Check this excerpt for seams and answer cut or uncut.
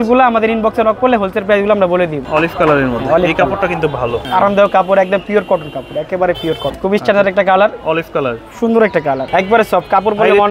cut